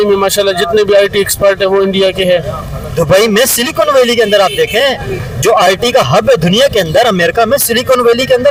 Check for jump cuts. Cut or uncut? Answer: uncut